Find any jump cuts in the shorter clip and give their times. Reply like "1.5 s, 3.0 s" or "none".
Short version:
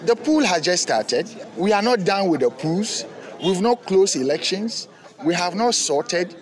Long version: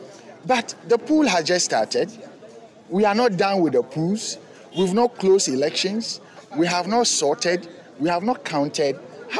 1.4 s